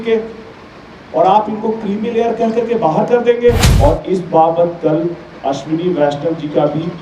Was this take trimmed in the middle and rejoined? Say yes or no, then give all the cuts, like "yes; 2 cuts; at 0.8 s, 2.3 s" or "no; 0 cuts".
yes; 1 cut; at 3.7 s